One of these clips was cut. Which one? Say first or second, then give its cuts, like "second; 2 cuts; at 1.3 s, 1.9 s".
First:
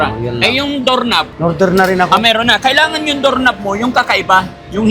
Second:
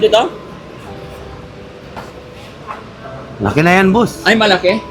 first; 1 cut; at 1.3 s